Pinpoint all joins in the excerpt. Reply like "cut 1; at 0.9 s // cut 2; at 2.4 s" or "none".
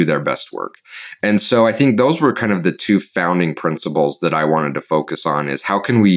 none